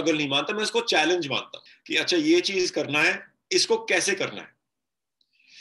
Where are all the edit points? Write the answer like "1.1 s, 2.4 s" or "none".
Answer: none